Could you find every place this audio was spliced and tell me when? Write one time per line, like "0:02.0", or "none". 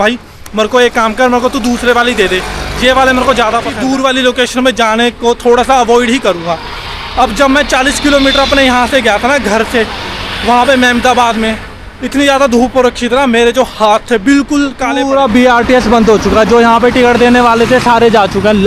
0:03.8
0:15.0